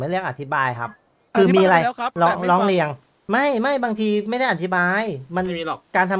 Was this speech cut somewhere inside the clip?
no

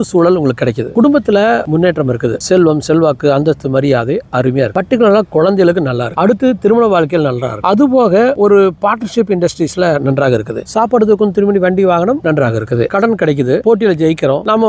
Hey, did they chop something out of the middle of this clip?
no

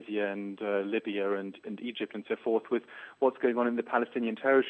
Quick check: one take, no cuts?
yes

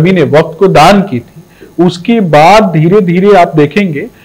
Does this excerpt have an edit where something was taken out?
no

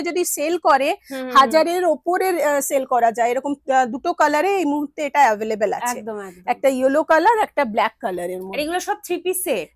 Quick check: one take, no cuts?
yes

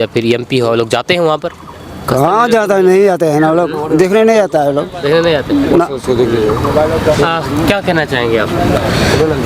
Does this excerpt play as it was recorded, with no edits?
yes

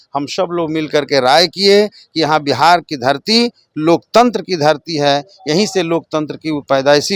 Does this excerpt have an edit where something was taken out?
no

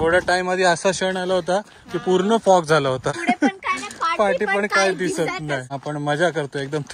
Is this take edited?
yes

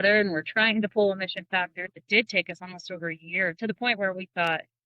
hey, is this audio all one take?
no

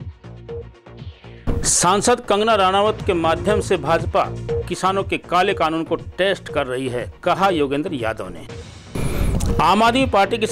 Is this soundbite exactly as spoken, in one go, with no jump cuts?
no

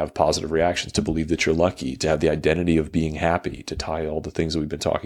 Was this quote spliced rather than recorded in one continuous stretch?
no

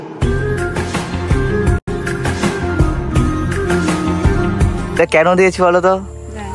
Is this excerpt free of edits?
no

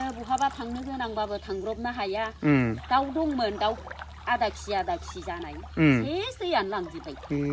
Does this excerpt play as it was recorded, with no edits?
yes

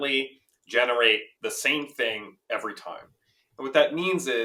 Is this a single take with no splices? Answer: yes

